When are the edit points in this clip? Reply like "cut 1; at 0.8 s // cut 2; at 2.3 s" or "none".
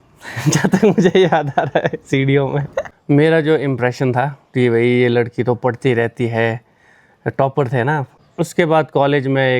cut 1; at 2.9 s // cut 2; at 8.2 s